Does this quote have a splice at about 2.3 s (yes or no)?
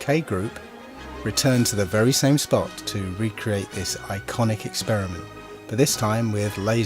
no